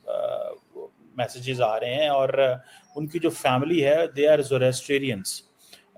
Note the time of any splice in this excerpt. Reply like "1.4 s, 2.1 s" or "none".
none